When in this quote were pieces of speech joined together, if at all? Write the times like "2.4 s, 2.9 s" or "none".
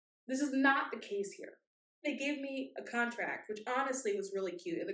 2.0 s

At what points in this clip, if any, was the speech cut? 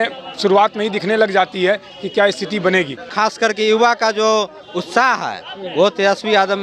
3.0 s

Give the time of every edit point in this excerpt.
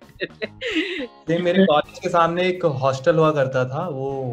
1.1 s

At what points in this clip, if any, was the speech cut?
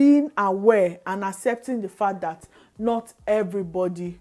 none

